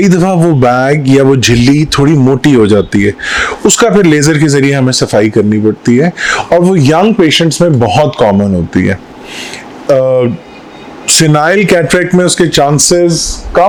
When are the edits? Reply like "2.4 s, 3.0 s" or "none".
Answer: none